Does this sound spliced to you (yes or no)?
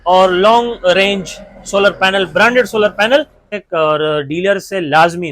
yes